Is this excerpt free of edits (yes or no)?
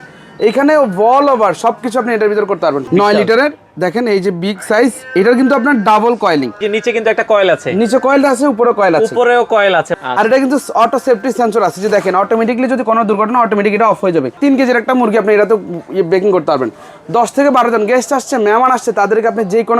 no